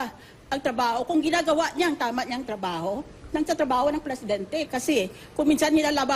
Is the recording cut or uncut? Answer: cut